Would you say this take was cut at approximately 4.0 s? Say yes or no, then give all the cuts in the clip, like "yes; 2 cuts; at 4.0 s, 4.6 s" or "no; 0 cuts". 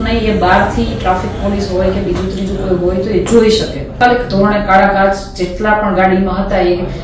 yes; 1 cut; at 4.0 s